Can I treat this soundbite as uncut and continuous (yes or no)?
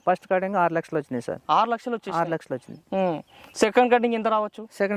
yes